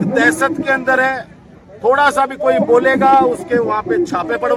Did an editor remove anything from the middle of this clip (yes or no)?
no